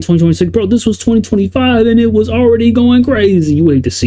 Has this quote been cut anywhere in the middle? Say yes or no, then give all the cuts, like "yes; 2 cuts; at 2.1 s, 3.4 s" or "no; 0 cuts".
no; 0 cuts